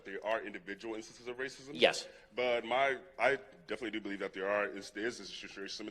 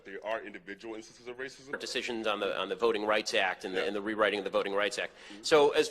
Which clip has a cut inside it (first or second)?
first